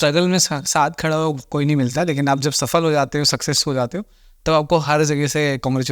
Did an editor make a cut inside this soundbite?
no; 0 cuts

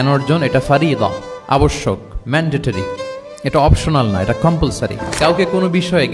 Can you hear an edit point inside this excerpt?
yes; 2 cuts; at 3.3 s, 5.1 s

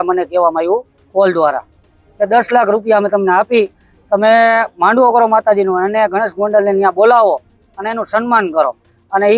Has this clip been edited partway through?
no; 0 cuts

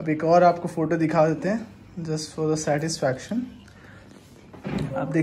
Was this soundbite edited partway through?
no; 0 cuts

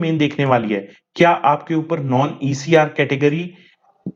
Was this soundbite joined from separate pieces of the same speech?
no; 0 cuts

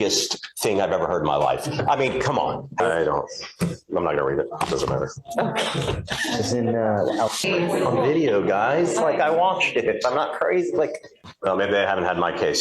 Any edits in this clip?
yes; 3 cuts; at 2.8 s, 7.5 s, 11.2 s

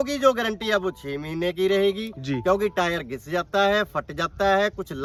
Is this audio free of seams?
yes; 0 cuts

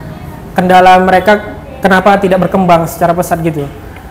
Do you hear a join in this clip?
no; 0 cuts

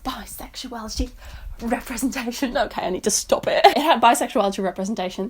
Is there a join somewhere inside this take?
no; 0 cuts

